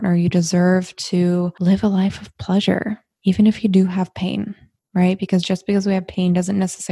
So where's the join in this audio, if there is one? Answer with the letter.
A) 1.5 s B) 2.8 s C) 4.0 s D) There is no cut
A